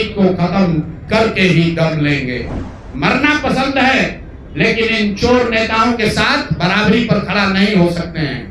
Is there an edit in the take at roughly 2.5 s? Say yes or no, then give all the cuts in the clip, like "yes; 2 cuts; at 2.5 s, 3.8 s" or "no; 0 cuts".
yes; 1 cut; at 2.5 s